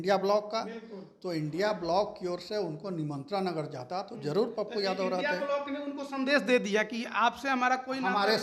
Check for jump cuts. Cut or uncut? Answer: uncut